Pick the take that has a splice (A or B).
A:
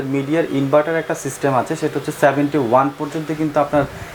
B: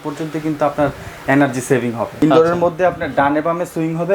B